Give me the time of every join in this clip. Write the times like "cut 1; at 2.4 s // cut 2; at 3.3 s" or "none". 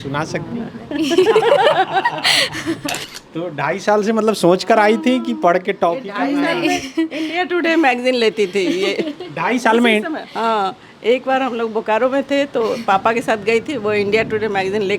cut 1; at 3.0 s

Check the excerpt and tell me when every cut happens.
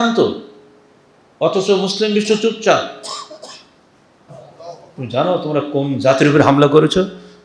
cut 1; at 4.3 s

